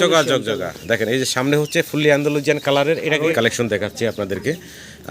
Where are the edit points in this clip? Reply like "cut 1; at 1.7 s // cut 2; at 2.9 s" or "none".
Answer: cut 1; at 3.3 s